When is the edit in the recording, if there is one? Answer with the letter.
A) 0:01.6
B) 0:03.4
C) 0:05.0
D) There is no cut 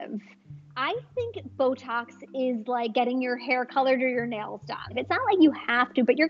C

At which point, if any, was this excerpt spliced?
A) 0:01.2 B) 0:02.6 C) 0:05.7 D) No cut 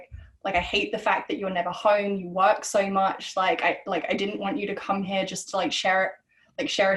D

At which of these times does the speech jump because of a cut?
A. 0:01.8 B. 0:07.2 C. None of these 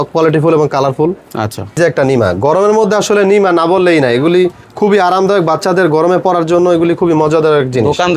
A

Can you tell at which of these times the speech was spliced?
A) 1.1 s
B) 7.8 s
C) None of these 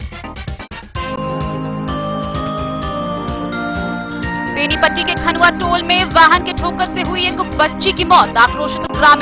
A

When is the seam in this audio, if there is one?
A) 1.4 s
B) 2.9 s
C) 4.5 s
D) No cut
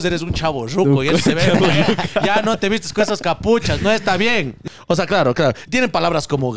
C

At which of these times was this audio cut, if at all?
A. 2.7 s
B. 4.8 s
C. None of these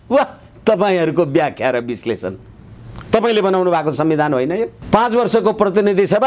B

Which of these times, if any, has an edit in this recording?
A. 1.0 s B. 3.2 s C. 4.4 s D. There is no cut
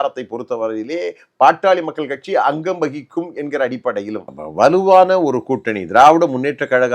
C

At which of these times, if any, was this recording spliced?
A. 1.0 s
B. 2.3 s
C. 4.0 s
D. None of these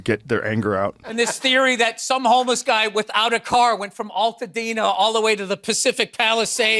A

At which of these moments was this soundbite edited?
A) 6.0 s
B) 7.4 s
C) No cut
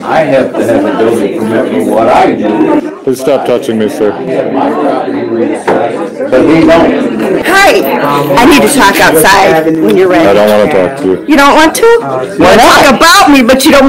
B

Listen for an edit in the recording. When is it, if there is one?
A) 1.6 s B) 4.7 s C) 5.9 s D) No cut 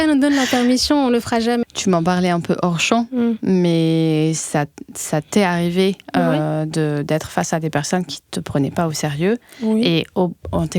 A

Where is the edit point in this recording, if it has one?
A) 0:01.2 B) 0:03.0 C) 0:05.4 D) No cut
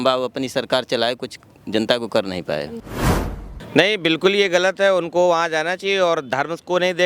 B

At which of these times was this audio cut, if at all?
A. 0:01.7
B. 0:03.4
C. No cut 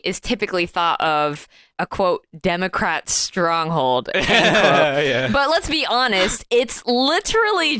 A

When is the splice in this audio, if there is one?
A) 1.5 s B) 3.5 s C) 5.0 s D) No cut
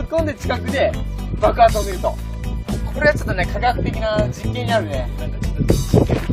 B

